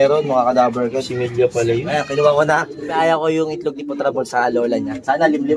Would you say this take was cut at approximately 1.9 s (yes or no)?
yes